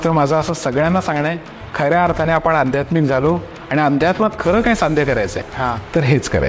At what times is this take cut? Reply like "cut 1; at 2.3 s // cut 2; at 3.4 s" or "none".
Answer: none